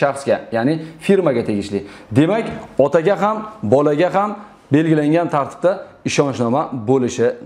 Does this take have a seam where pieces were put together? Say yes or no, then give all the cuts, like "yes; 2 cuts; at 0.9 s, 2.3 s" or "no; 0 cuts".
no; 0 cuts